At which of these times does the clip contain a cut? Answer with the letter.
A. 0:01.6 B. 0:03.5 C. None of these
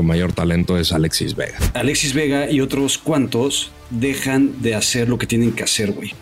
A